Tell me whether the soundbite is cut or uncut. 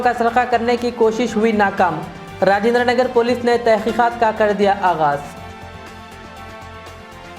uncut